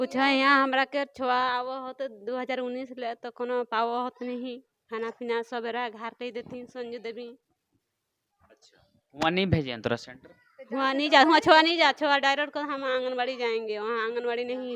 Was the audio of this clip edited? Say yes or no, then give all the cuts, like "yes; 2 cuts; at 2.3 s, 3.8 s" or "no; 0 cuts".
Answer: no; 0 cuts